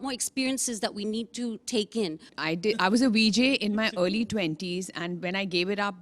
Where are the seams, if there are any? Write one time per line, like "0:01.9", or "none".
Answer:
0:02.3